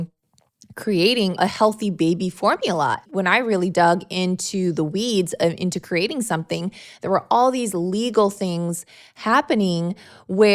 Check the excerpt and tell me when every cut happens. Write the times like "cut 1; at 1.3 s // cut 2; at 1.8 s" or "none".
cut 1; at 1.4 s // cut 2; at 3.0 s